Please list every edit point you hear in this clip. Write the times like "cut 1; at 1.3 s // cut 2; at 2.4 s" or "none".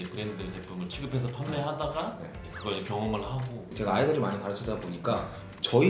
cut 1; at 2.4 s // cut 2; at 3.7 s